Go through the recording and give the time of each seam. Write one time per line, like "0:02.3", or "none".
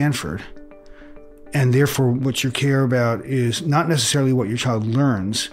none